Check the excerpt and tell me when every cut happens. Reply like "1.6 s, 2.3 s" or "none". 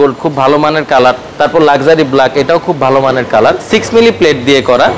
3.7 s

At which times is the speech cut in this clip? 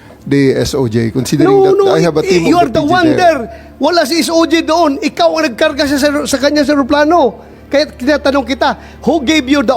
none

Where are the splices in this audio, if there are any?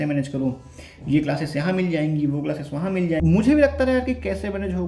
3.2 s

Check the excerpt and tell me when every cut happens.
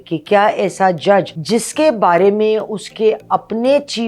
1.4 s

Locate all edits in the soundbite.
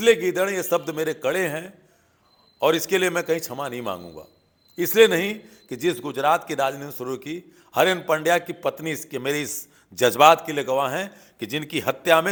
none

